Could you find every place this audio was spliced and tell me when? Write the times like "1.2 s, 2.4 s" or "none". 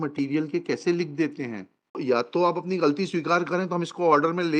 2.3 s